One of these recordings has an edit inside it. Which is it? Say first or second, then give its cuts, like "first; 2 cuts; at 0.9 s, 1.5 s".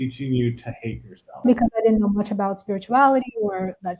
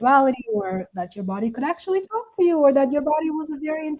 first; 1 cut; at 1.5 s